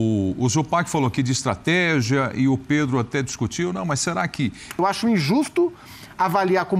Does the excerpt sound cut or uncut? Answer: cut